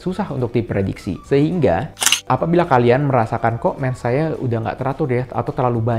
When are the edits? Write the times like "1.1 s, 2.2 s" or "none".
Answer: 2.0 s